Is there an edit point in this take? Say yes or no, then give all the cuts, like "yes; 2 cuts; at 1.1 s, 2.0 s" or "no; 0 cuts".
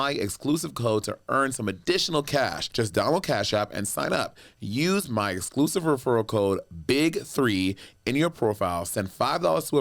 yes; 1 cut; at 2.6 s